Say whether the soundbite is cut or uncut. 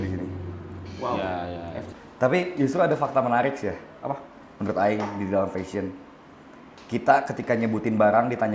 cut